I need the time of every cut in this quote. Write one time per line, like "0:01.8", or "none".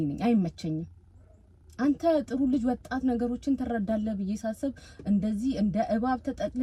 none